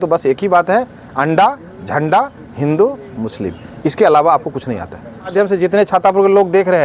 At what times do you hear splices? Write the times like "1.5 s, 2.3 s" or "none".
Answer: 5.3 s